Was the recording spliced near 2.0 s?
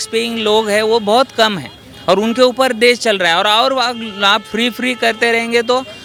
no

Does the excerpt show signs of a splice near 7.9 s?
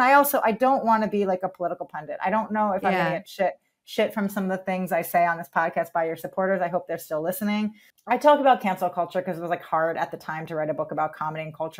yes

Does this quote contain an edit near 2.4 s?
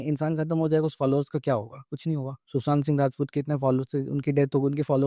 yes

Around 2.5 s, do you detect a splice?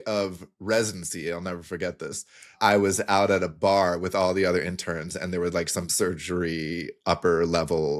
yes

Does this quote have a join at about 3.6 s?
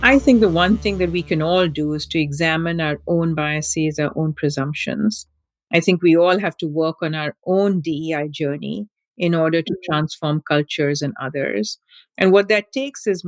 no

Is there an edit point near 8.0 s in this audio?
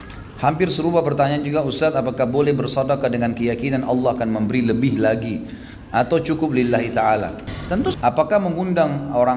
yes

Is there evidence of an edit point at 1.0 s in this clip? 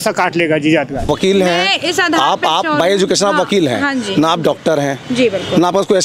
yes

